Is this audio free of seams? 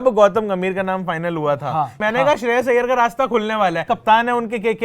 no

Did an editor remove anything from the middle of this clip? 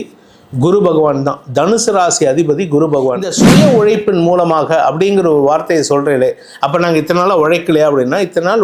yes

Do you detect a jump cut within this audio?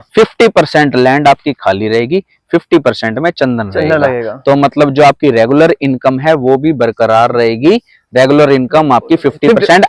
no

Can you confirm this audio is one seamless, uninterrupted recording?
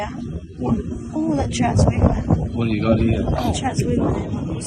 yes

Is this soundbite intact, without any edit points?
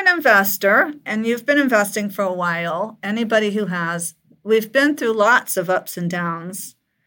no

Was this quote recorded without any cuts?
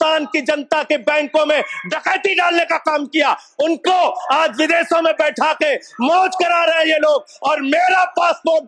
yes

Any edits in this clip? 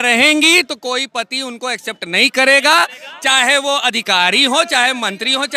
no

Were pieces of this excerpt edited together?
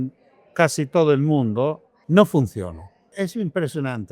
yes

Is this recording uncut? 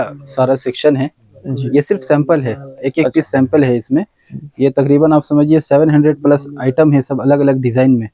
yes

